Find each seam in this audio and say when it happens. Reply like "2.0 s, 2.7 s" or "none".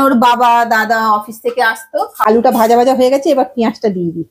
2.1 s